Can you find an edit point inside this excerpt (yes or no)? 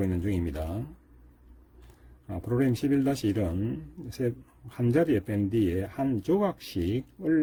no